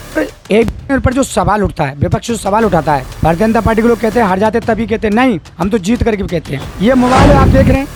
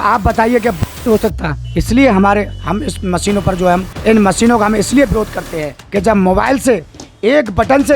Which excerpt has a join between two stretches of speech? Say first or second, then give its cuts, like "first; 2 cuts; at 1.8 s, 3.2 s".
second; 1 cut; at 3.9 s